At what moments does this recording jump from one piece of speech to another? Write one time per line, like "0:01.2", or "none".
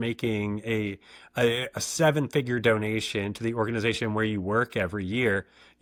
none

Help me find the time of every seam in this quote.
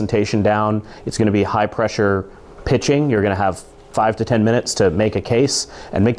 none

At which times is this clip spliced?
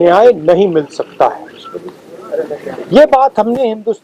none

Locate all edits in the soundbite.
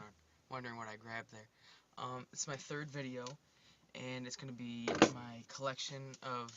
0:01.0

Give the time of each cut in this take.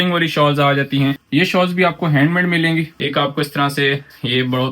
0:01.2
0:02.9

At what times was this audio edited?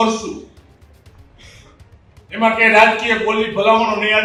none

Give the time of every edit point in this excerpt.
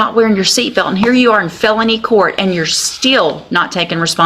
none

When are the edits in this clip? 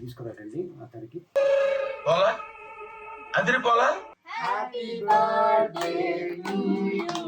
0:04.1

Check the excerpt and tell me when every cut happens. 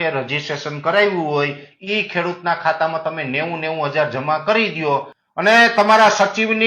0:05.2

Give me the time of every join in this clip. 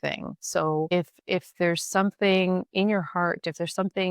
0:00.9

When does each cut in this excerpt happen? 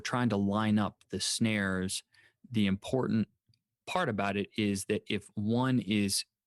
0:03.8

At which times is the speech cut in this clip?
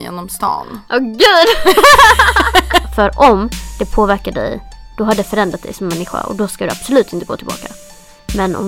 0:02.9

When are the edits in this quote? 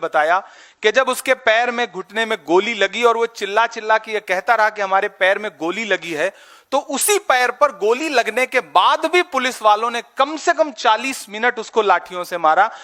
none

